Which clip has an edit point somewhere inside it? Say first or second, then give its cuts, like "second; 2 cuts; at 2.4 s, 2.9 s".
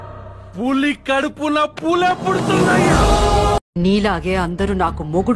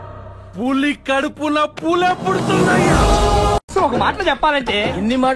first; 1 cut; at 3.7 s